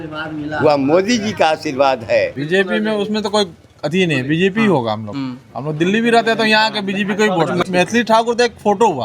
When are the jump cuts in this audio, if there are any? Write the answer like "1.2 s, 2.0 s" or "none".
2.4 s, 7.6 s